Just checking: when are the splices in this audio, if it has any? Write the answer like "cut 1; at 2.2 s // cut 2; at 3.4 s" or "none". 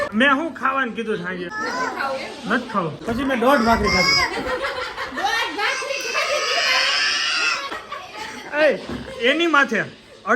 cut 1; at 1.5 s // cut 2; at 3.0 s // cut 3; at 7.7 s